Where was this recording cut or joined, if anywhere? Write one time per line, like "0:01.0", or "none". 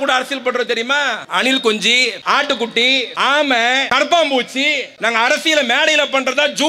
0:01.2
0:02.2
0:03.1
0:03.9
0:04.9